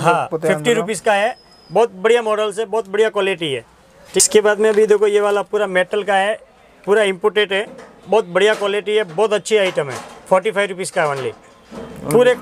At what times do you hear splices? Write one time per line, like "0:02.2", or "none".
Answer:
none